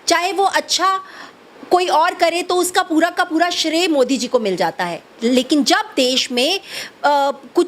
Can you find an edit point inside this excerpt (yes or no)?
no